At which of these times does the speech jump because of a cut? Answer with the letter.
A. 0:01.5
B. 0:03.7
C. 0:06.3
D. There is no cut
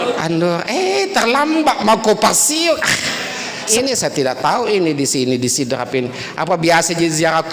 B